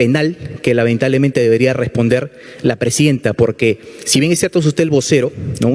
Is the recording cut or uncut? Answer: uncut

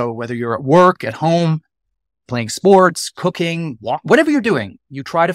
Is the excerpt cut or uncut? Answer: uncut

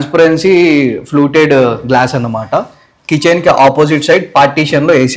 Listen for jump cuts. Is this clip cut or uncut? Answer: uncut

